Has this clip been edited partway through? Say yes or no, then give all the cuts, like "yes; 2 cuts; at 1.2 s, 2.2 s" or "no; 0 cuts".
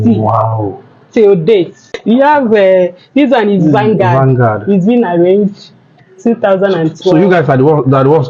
yes; 1 cut; at 1.9 s